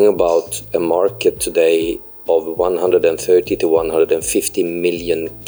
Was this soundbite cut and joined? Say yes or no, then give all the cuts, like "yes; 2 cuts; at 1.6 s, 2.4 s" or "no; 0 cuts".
no; 0 cuts